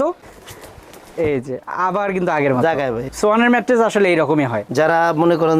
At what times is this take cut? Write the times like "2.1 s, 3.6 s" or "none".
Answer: 3.0 s, 4.6 s